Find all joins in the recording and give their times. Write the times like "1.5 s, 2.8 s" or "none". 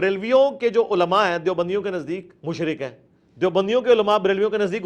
2.3 s